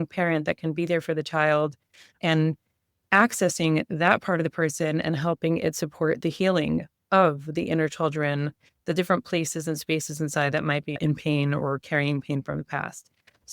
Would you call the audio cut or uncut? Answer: cut